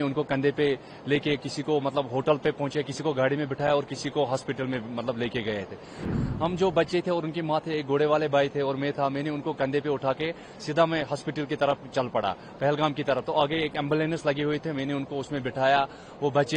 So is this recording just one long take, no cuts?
no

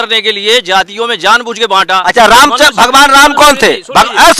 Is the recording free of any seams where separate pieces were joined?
yes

